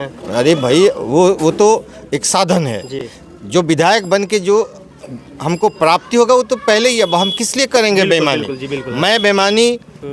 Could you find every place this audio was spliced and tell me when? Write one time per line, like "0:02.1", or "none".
none